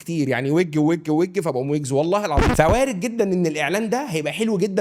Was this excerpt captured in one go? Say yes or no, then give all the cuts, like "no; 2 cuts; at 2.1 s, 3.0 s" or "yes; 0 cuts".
no; 1 cut; at 2.5 s